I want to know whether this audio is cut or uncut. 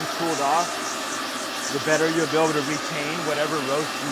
uncut